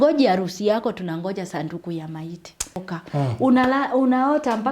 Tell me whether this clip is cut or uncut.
cut